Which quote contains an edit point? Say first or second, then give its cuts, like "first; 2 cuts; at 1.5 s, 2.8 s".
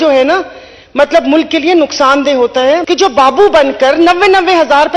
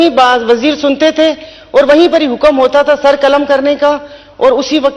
first; 1 cut; at 2.8 s